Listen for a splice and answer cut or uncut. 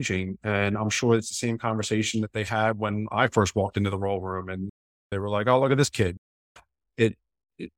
uncut